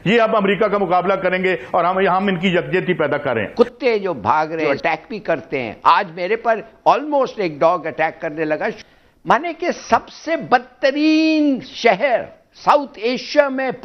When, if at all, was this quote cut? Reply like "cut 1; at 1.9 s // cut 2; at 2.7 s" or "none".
cut 1; at 3.5 s // cut 2; at 4.6 s // cut 3; at 8.8 s